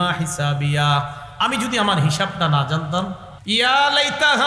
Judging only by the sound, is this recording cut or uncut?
cut